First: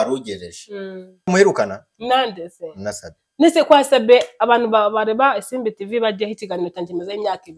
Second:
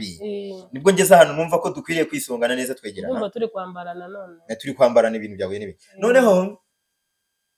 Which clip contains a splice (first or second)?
first